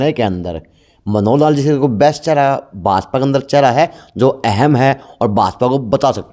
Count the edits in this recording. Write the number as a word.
zero